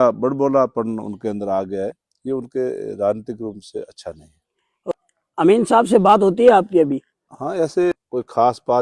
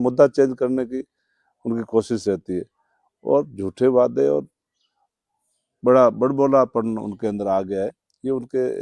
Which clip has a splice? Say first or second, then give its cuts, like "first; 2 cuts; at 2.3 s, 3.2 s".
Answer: first; 2 cuts; at 4.9 s, 7.9 s